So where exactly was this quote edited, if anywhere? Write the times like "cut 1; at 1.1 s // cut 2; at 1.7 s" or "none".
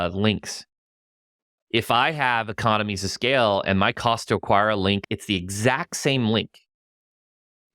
cut 1; at 5.0 s